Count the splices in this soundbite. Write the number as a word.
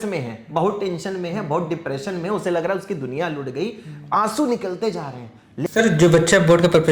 one